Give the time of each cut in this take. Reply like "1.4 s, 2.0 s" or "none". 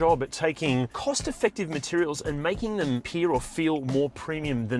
0.9 s, 3.1 s